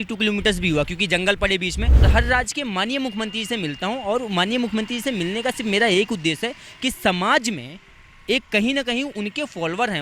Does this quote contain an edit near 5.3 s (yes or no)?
no